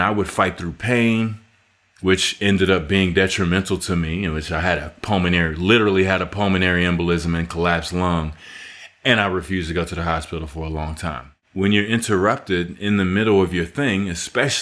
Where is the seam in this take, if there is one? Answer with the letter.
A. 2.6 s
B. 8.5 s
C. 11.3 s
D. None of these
C